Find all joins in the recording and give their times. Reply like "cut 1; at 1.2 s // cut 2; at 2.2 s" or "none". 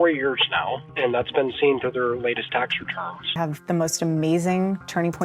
cut 1; at 3.3 s